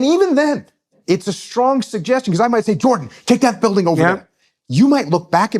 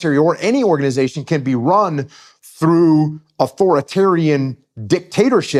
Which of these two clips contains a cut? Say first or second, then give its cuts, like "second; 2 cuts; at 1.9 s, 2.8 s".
first; 1 cut; at 0.9 s